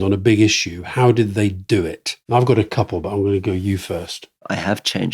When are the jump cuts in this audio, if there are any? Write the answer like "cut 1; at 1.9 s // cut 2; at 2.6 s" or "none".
none